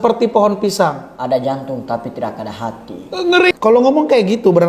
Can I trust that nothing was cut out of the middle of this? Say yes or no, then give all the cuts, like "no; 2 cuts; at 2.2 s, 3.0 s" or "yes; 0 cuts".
no; 1 cut; at 3.5 s